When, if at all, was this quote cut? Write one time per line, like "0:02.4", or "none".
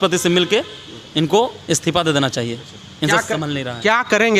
none